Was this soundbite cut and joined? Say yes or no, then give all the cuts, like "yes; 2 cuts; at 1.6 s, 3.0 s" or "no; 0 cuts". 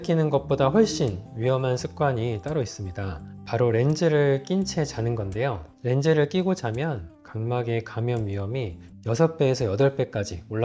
no; 0 cuts